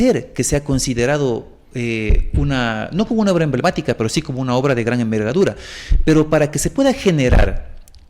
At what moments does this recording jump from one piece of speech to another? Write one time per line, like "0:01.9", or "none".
none